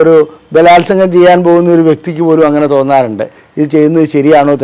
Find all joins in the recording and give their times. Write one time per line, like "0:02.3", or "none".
none